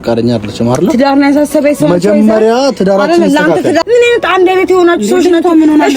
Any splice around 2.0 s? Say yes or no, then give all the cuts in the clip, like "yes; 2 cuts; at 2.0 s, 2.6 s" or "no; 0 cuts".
no; 1 cut; at 3.8 s